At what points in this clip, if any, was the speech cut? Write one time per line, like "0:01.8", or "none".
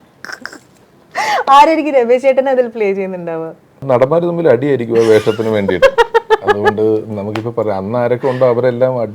0:03.8